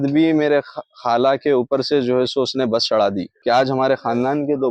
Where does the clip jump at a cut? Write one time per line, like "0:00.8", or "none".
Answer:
0:03.3